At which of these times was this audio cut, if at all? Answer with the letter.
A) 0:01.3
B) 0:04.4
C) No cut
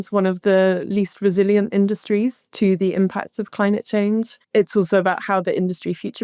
B